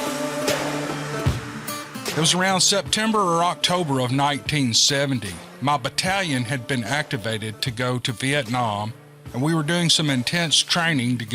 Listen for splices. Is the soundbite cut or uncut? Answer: cut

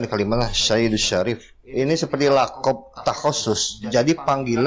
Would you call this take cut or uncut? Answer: cut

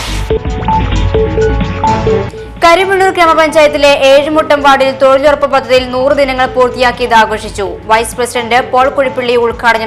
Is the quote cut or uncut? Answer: cut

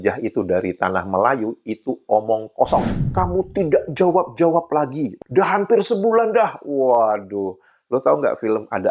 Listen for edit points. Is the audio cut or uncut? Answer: cut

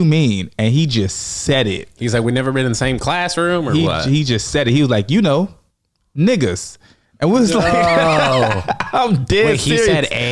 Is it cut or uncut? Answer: uncut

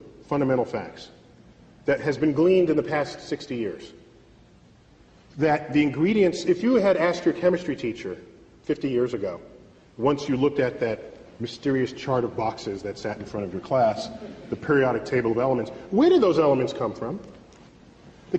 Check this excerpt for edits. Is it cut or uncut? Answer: cut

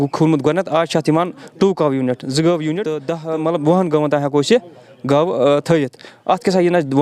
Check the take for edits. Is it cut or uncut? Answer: cut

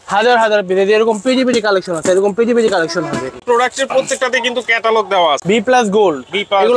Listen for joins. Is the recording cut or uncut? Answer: cut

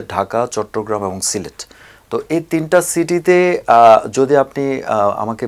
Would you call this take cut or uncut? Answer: uncut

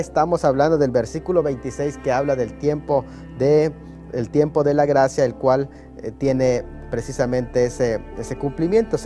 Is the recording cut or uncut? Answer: uncut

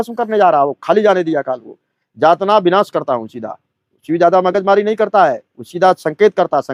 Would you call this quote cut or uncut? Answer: uncut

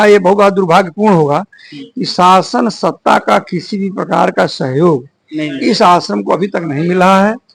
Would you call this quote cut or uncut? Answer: uncut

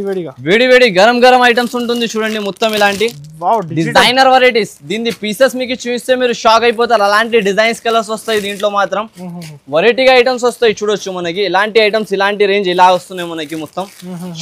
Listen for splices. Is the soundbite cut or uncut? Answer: uncut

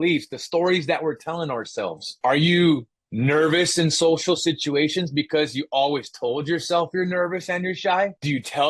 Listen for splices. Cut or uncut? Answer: uncut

